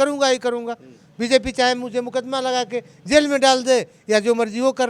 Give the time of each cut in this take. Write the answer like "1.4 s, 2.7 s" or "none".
none